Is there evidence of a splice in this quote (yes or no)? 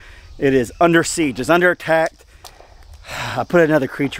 no